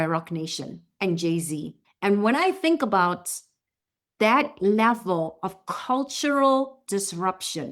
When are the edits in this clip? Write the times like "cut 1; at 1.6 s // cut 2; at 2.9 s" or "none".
cut 1; at 1.8 s